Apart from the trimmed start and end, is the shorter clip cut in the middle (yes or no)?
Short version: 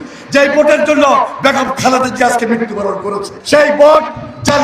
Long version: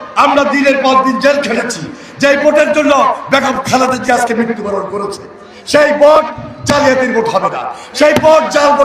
yes